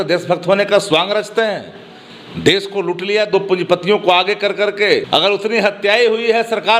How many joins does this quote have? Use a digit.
1